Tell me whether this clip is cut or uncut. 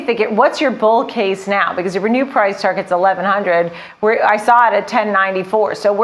uncut